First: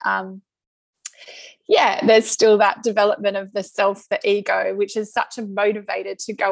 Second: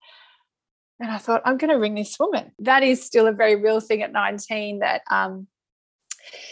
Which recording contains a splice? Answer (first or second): second